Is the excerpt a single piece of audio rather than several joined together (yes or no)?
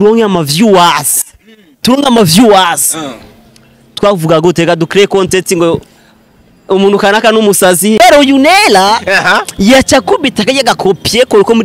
no